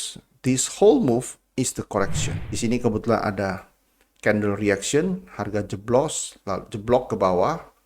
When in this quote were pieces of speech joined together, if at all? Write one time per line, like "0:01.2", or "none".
0:02.5